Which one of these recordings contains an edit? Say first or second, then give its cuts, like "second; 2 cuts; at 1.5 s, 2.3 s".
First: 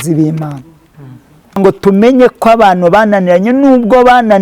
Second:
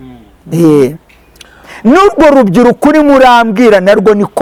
first; 1 cut; at 1.6 s